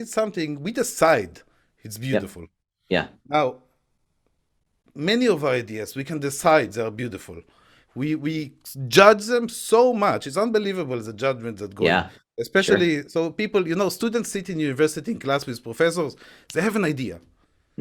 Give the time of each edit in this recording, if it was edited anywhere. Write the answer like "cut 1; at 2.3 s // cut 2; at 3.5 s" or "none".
none